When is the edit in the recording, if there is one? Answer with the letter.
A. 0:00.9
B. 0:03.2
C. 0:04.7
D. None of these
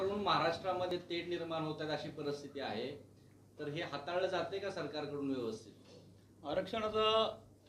A